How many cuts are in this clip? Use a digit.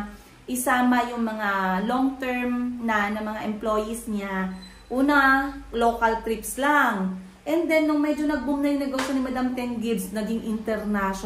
0